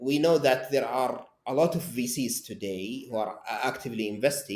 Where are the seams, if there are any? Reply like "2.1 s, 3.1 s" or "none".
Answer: none